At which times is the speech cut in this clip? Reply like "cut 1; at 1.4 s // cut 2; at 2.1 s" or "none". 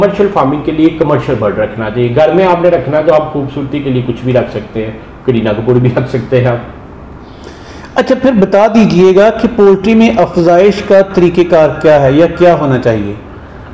none